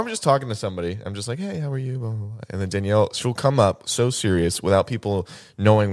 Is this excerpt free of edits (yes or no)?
yes